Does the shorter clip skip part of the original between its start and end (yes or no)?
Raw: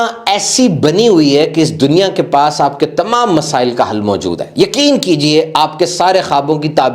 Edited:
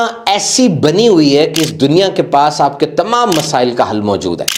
no